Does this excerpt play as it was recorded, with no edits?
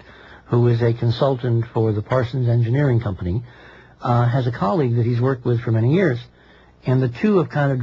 no; 1 cut; at 1.5 s

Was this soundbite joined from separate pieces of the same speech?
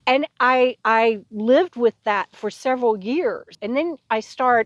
yes; 1 cut; at 3.5 s

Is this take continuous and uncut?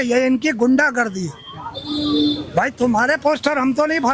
yes; 0 cuts

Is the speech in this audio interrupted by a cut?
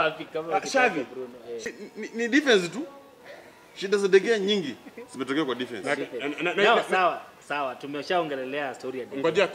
yes; 1 cut; at 1.6 s

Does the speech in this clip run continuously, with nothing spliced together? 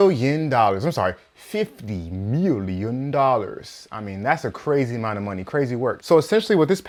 yes; 0 cuts

